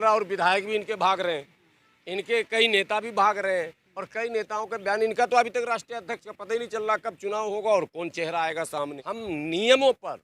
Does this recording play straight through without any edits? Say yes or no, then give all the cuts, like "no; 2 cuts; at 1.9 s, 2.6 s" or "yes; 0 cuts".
no; 1 cut; at 9.0 s